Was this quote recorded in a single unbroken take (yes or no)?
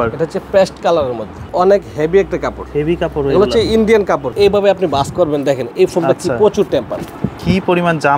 no